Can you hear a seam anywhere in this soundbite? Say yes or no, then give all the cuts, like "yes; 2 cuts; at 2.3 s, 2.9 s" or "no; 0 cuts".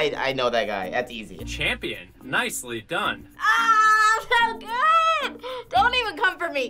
no; 0 cuts